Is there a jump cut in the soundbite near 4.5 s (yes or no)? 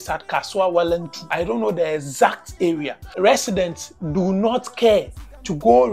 no